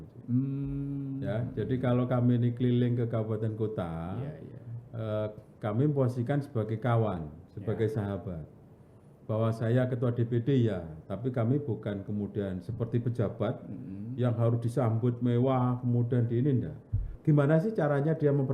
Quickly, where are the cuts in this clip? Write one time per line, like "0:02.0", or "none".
0:17.1